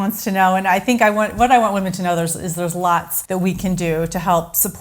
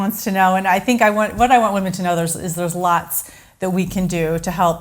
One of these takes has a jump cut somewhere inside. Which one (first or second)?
first